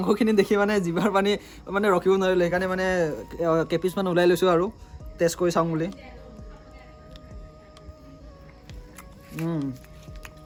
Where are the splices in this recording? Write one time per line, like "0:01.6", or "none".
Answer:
none